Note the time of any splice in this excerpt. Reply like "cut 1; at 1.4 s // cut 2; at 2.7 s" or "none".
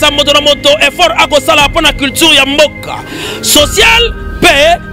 none